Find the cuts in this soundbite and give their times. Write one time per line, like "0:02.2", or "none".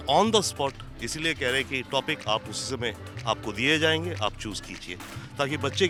none